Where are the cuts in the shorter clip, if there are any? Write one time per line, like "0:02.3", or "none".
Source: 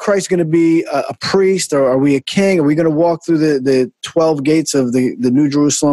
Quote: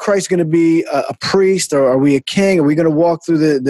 none